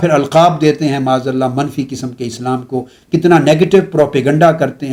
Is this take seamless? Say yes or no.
yes